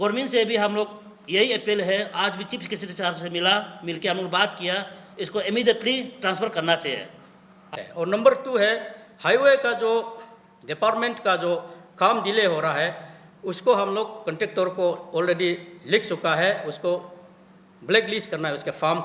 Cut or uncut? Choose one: cut